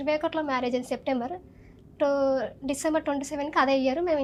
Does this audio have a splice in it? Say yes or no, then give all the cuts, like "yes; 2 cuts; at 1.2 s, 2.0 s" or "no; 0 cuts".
no; 0 cuts